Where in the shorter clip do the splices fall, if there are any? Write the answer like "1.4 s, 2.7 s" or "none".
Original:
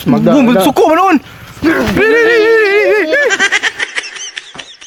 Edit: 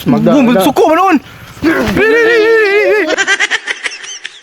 3.2 s